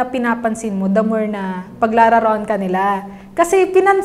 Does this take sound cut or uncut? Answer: uncut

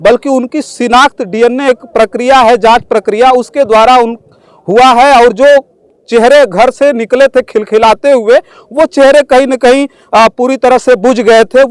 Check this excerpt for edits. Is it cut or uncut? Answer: uncut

